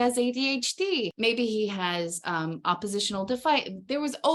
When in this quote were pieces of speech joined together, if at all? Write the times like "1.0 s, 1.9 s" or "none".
none